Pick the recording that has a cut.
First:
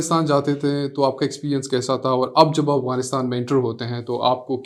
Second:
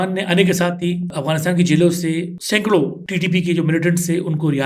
second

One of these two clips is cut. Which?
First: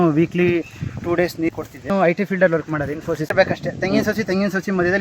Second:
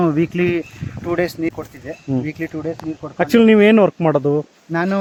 first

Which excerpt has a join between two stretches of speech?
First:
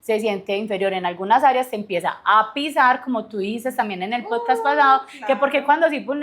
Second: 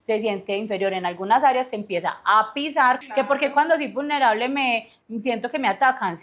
second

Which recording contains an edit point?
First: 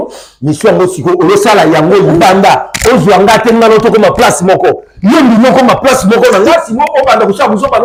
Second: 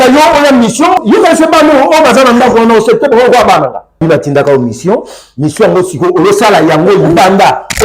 second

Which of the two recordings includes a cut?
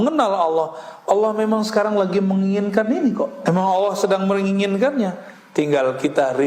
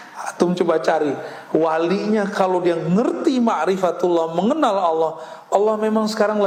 first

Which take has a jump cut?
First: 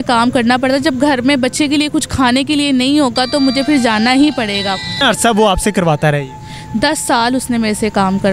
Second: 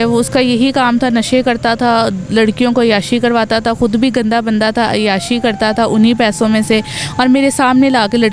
first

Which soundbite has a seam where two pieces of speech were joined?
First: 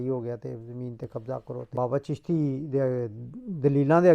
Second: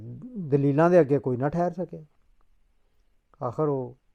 first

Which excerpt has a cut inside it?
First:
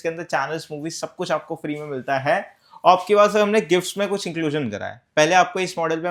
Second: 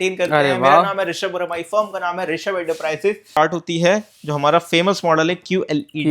second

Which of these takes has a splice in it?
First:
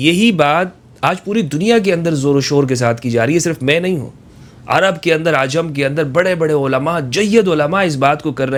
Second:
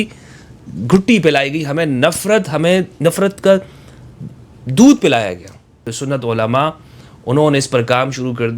second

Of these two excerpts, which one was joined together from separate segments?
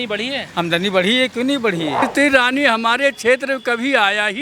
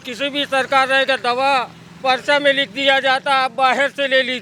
first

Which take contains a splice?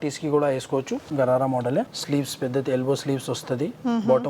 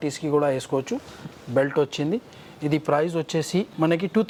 first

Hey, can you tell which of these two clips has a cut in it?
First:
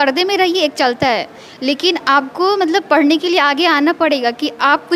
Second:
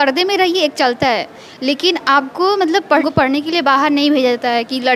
second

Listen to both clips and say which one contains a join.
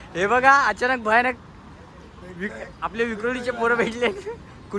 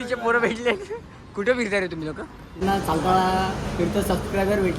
second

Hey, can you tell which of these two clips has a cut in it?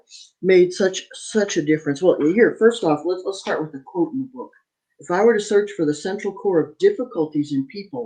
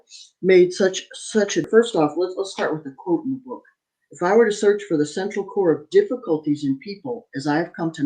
second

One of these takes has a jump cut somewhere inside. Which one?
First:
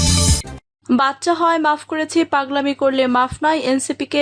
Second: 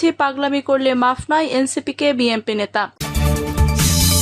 second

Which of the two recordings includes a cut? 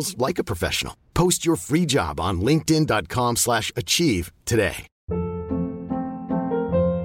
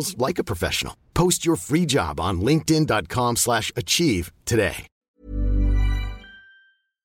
first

